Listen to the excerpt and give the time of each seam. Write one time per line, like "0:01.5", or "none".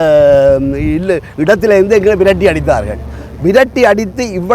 none